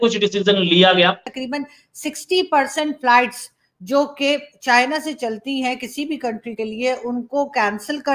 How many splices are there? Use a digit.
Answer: 1